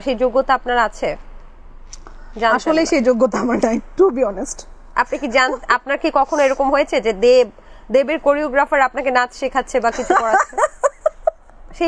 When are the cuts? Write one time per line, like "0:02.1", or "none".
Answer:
none